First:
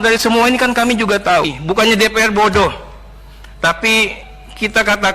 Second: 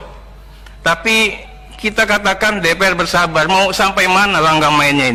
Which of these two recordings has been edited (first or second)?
first